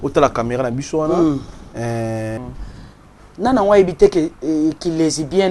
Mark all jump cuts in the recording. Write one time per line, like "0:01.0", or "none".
0:02.4